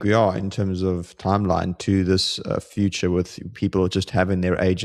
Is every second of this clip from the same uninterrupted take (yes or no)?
yes